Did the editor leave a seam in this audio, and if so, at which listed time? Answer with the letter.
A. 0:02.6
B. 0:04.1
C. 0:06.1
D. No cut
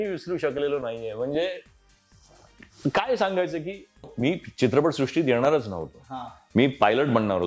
B